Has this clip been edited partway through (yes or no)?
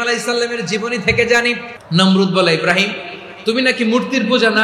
yes